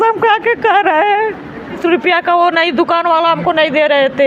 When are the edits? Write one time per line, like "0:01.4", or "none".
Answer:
0:01.8